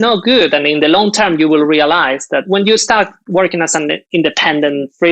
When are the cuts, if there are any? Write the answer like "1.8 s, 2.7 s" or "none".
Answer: 2.5 s, 4.0 s